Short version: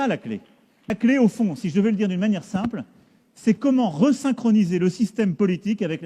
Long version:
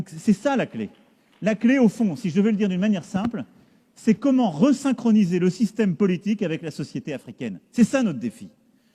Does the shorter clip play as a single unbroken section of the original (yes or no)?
no